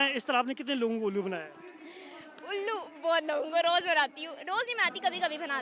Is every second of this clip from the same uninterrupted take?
yes; 0 cuts

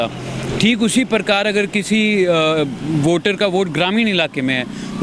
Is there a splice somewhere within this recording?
no; 0 cuts

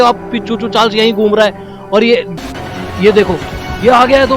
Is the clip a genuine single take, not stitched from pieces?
no; 1 cut; at 2.4 s

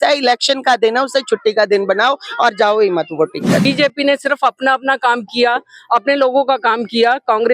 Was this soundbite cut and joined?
yes; 1 cut; at 3.6 s

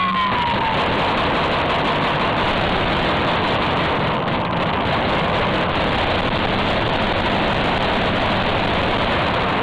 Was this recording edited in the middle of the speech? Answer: no; 0 cuts

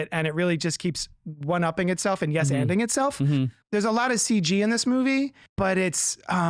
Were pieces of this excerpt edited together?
yes; 2 cuts; at 3.6 s, 5.4 s

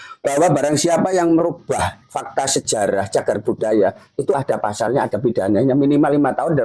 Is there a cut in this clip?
no; 0 cuts

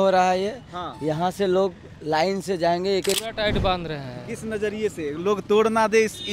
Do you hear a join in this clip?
yes; 1 cut; at 3.2 s

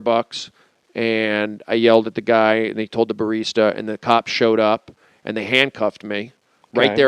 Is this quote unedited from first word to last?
no; 1 cut; at 5.0 s

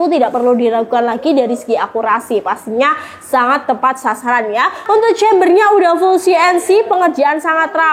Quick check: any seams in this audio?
yes; 1 cut; at 4.8 s

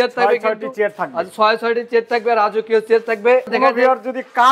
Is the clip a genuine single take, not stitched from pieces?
no; 1 cut; at 3.5 s

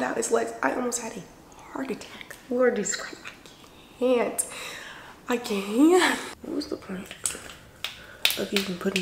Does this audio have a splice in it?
yes; 1 cut; at 6.3 s

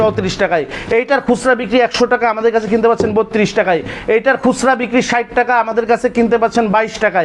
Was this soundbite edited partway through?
no; 0 cuts

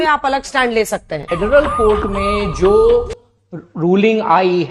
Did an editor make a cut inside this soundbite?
yes; 1 cut; at 1.3 s

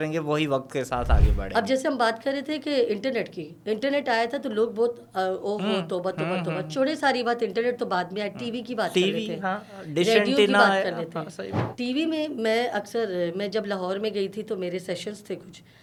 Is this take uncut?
yes; 0 cuts

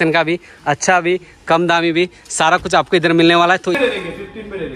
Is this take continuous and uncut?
no; 1 cut; at 3.7 s

